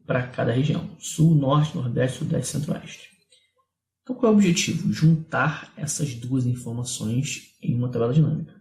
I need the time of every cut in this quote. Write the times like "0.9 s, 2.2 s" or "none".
5.1 s